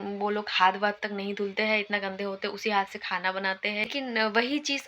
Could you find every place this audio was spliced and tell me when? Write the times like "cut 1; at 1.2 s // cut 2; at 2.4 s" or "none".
cut 1; at 3.8 s